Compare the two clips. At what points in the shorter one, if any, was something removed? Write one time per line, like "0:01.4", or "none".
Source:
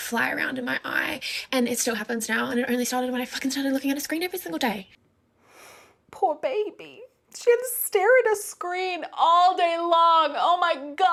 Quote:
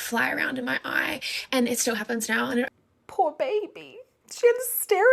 0:02.7